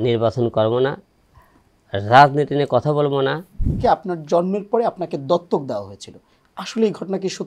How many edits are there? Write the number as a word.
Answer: one